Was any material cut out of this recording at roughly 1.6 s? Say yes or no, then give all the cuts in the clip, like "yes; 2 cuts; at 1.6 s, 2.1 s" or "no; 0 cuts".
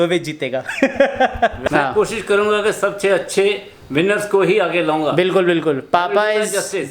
yes; 1 cut; at 1.6 s